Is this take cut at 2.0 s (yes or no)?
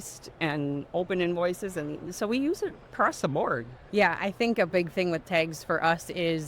no